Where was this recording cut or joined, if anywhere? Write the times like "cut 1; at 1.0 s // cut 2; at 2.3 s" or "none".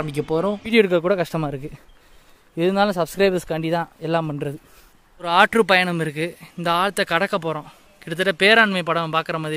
cut 1; at 0.7 s // cut 2; at 5.3 s